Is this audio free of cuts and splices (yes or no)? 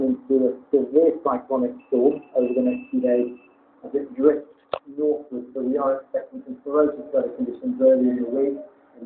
yes